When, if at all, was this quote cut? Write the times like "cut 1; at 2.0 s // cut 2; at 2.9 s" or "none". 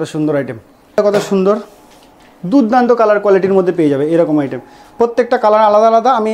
cut 1; at 1.0 s